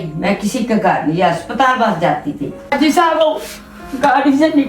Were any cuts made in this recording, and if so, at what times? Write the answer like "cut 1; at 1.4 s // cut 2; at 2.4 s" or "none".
cut 1; at 2.7 s

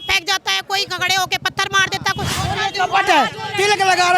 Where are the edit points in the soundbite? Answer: cut 1; at 2.3 s

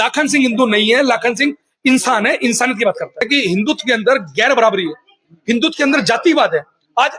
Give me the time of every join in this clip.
cut 1; at 3.3 s

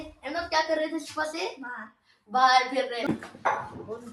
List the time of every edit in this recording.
cut 1; at 3.1 s

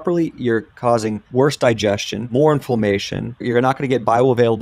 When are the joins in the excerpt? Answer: cut 1; at 1.2 s // cut 2; at 2.1 s // cut 3; at 3.4 s

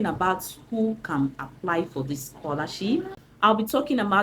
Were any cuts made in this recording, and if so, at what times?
cut 1; at 3.2 s

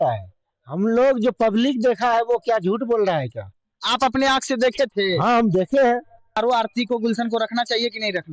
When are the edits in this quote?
cut 1; at 6.4 s

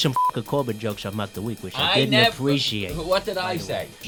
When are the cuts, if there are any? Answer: none

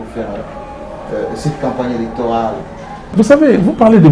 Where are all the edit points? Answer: cut 1; at 3.1 s

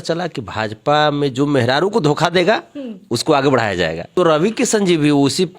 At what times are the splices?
cut 1; at 4.1 s

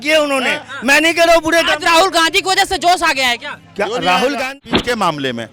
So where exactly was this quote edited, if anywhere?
cut 1; at 4.5 s

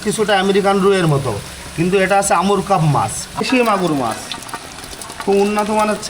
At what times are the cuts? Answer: cut 1; at 3.2 s

